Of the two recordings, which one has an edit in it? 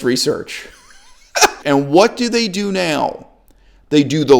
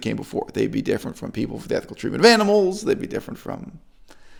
first; 1 cut; at 1.6 s

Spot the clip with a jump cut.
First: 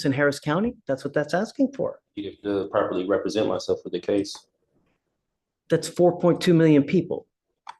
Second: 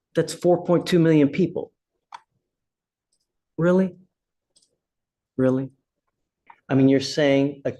second; 1 cut; at 6.4 s

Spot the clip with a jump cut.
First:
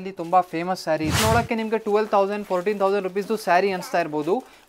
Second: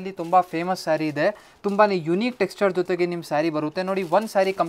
first; 1 cut; at 1.2 s

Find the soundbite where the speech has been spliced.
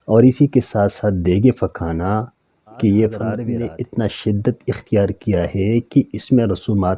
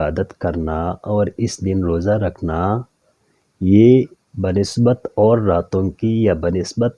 first; 1 cut; at 3.4 s

